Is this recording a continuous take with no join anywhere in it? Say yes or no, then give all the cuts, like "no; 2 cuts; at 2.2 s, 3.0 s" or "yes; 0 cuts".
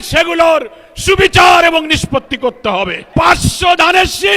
no; 1 cut; at 3.0 s